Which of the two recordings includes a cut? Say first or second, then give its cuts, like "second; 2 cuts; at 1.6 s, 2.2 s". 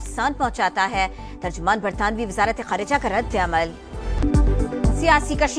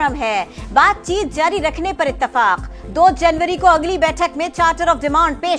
first; 1 cut; at 4.2 s